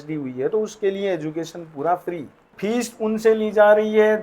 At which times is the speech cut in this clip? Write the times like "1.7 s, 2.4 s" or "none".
2.5 s

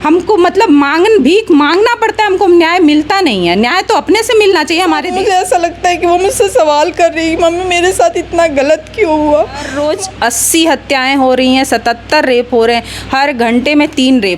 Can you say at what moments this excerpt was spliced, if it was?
5.1 s, 9.7 s

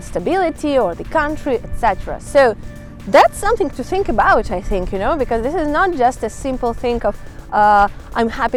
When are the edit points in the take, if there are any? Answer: none

